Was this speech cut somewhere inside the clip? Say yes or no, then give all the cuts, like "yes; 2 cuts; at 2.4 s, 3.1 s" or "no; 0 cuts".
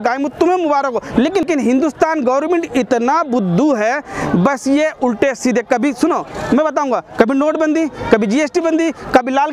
yes; 1 cut; at 1.4 s